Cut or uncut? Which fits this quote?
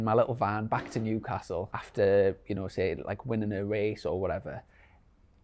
cut